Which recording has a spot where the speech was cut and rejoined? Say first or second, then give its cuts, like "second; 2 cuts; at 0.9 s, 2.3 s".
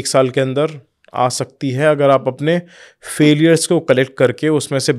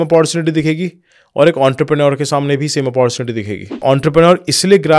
second; 1 cut; at 3.8 s